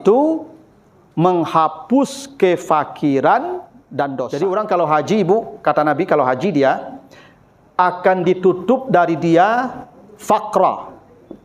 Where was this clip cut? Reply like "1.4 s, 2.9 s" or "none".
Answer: 4.2 s